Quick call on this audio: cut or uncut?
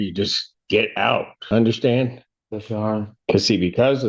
cut